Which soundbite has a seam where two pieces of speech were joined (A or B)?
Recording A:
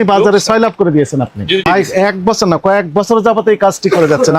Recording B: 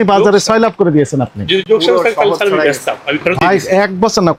A